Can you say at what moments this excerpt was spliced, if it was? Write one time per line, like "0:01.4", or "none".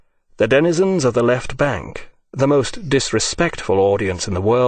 0:01.2